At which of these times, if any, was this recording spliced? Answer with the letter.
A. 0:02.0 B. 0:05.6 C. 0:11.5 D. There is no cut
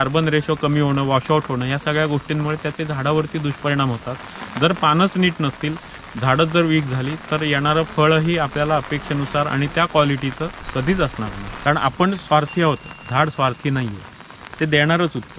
C